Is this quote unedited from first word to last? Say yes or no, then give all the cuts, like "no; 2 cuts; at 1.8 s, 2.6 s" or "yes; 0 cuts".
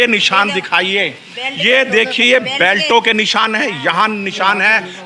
yes; 0 cuts